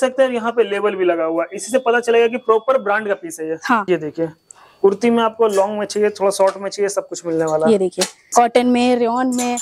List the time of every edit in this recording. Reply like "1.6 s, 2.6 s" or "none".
3.8 s, 8.2 s